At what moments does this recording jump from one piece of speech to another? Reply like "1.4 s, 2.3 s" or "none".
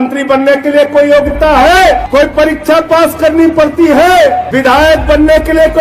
2.0 s, 4.5 s